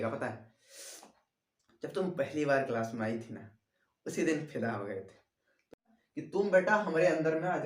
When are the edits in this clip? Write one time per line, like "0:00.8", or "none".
0:05.7